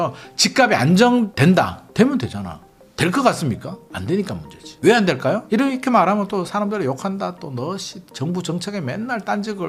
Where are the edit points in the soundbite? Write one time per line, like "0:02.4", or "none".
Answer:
0:01.3